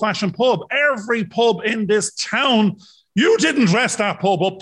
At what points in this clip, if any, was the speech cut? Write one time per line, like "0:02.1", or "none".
none